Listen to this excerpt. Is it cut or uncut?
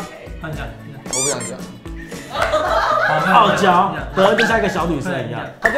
uncut